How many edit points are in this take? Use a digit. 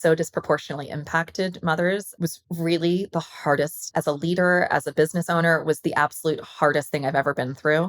2